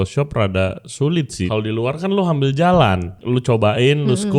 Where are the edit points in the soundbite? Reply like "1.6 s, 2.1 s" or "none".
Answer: 1.4 s, 3.2 s